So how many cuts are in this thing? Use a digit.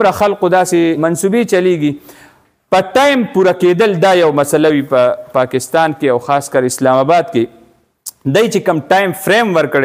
1